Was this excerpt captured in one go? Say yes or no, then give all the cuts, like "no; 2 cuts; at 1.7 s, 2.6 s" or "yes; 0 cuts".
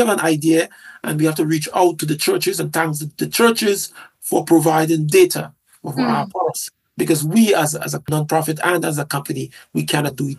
yes; 0 cuts